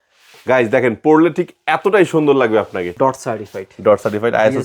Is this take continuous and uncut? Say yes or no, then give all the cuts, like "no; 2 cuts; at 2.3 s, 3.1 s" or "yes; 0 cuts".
no; 1 cut; at 2.8 s